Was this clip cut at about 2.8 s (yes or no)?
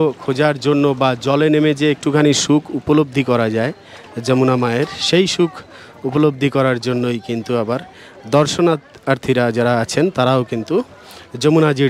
no